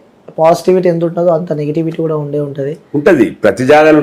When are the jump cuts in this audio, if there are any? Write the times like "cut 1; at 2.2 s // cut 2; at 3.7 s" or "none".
none